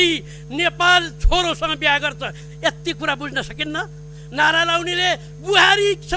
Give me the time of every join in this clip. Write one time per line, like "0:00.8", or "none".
none